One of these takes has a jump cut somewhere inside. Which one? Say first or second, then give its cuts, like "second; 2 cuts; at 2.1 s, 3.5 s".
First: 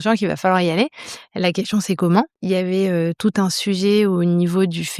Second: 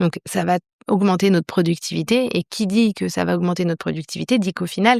first; 1 cut; at 2.4 s